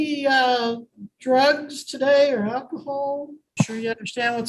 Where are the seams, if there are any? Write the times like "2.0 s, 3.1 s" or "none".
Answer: 3.3 s